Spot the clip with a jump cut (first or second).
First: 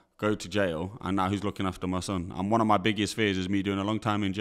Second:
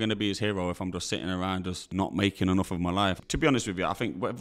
second